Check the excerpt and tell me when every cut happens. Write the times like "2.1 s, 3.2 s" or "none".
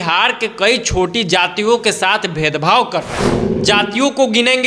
3.5 s